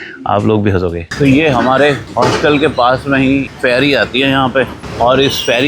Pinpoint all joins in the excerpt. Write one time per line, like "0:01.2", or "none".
0:01.1
0:02.0
0:03.5
0:04.8